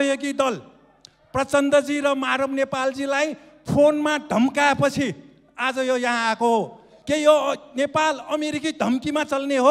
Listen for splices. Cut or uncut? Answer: uncut